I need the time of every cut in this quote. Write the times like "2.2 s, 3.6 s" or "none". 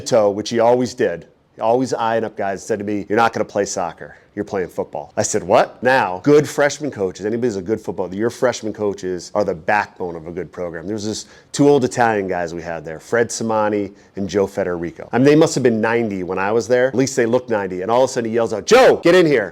none